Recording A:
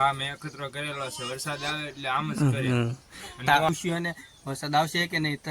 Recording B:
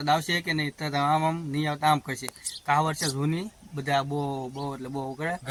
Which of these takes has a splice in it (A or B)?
A